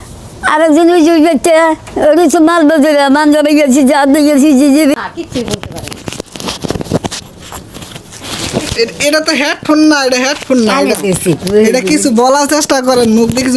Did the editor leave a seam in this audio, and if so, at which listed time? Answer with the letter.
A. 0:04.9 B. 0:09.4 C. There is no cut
A